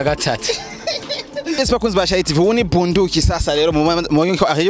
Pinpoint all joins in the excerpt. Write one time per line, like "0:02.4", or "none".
0:01.6